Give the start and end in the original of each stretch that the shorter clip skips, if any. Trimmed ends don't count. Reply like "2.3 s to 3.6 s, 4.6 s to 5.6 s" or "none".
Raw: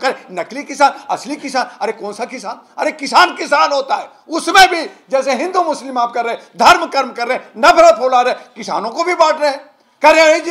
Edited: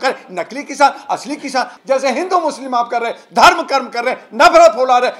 1.7 s to 5.0 s